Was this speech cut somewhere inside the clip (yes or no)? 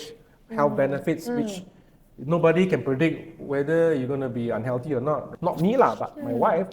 yes